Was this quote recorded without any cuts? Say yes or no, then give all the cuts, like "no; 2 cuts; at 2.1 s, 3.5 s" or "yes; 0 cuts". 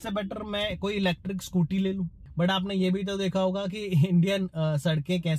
no; 1 cut; at 2.2 s